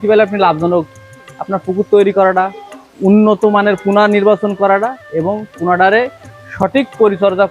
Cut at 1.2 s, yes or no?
no